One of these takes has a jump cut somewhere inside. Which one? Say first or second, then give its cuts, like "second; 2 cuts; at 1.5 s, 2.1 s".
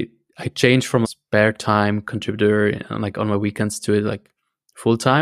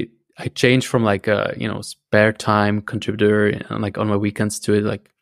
first; 1 cut; at 1.1 s